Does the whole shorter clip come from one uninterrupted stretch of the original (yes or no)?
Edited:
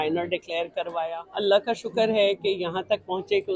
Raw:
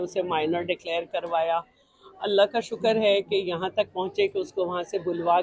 no